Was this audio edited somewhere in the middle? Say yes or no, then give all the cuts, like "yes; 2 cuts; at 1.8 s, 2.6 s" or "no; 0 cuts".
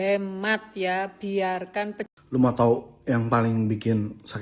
yes; 1 cut; at 2.0 s